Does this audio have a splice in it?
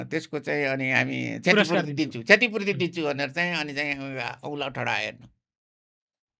no; 0 cuts

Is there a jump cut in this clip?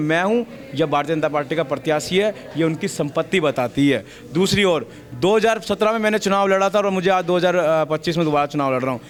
no; 0 cuts

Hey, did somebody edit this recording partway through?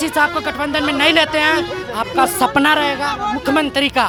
no; 0 cuts

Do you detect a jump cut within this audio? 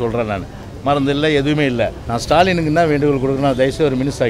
yes; 1 cut; at 2.1 s

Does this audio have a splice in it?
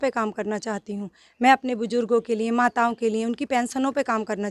no; 0 cuts

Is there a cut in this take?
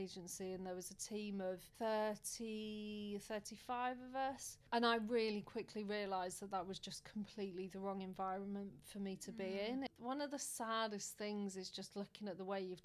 yes; 3 cuts; at 1.7 s, 4.5 s, 9.9 s

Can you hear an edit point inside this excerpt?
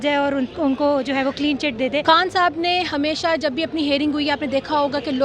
yes; 1 cut; at 2.0 s

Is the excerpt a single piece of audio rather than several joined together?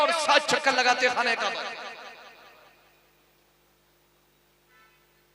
yes; 0 cuts

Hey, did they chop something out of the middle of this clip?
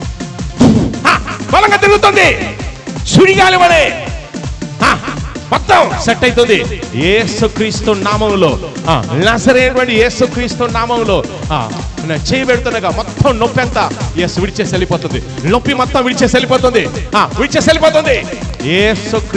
no; 0 cuts

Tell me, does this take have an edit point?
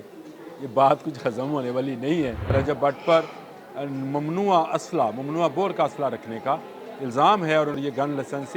yes; 2 cuts; at 2.5 s, 7.8 s

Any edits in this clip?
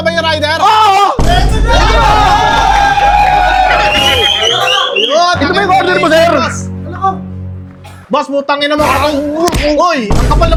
no; 0 cuts

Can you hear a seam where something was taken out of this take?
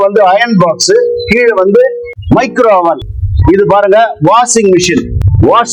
no; 0 cuts

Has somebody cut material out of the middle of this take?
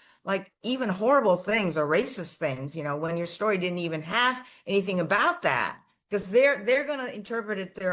no; 0 cuts

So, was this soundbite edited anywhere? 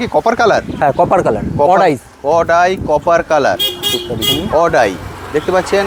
no; 0 cuts

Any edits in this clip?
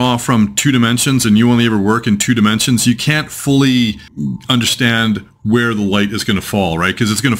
no; 0 cuts

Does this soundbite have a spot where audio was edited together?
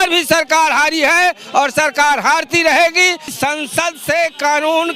yes; 1 cut; at 3.3 s

